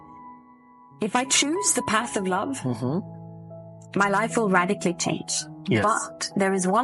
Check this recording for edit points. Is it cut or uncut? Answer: uncut